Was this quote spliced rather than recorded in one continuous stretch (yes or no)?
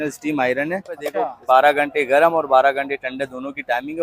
yes